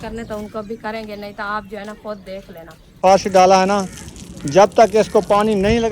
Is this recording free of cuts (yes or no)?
no